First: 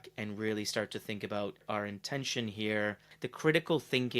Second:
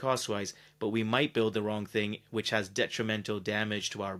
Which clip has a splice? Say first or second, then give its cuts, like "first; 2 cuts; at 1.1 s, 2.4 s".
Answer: first; 2 cuts; at 1.6 s, 3.1 s